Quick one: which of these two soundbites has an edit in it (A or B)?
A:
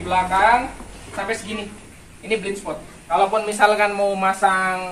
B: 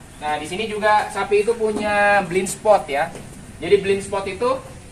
A